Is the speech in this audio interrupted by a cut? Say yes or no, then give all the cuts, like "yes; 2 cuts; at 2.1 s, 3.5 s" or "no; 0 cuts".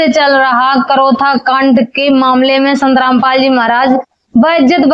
no; 0 cuts